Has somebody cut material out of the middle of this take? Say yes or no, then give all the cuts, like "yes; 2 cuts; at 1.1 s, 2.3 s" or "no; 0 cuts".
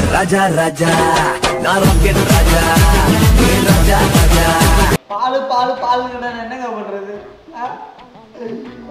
yes; 1 cut; at 5.0 s